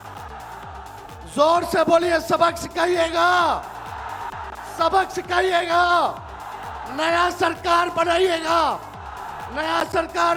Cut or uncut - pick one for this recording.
uncut